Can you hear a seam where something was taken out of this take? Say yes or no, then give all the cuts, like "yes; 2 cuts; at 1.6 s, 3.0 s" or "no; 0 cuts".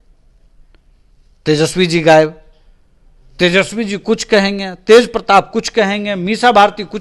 no; 0 cuts